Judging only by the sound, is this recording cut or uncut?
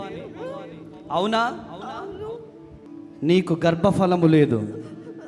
cut